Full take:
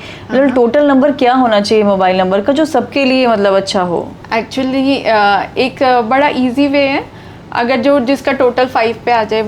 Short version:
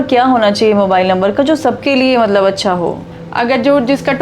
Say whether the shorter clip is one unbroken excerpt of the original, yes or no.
no